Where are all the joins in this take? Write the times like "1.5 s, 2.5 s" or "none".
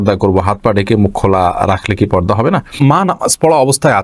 2.8 s